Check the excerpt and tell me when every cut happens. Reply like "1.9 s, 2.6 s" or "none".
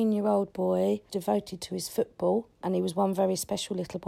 1.1 s, 2.6 s

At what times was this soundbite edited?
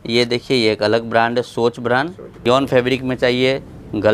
2.4 s

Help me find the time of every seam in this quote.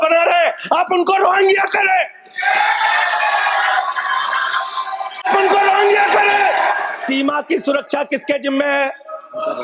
5.2 s, 6.9 s

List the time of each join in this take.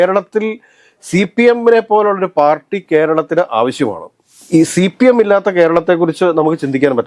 none

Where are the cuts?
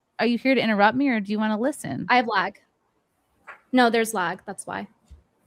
none

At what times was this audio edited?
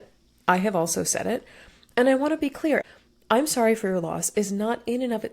2.8 s

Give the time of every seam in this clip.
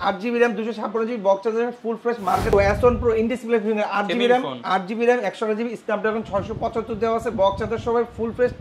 2.5 s

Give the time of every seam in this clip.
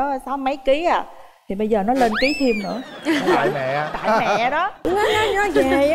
4.8 s

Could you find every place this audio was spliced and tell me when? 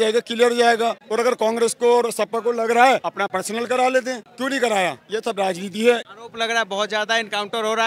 3.2 s, 5.0 s, 6.0 s

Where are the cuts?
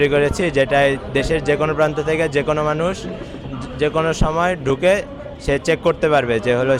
none

